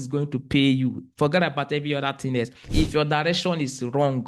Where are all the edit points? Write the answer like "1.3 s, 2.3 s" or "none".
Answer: 2.6 s